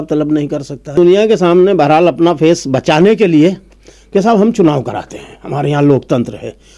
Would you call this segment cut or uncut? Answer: cut